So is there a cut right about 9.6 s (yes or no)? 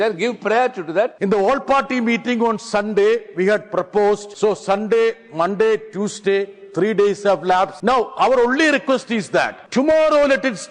yes